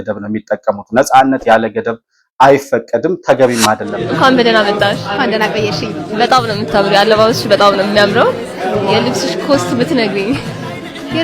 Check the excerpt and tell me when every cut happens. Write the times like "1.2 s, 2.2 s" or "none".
4.0 s